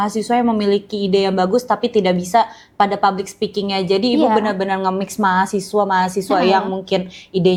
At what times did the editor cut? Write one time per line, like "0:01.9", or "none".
none